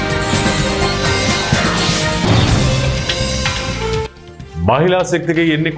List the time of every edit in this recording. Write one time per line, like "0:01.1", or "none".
0:01.8